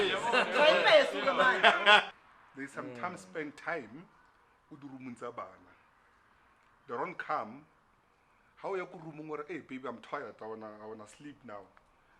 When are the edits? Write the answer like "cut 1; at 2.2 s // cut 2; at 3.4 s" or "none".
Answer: cut 1; at 2.1 s